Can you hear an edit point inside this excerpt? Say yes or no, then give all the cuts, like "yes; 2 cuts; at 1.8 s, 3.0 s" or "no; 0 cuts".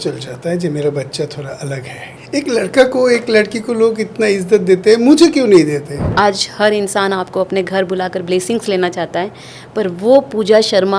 yes; 2 cuts; at 2.2 s, 6.0 s